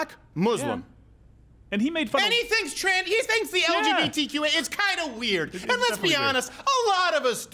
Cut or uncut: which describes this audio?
uncut